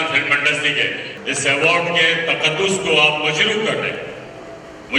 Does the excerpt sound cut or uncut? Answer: cut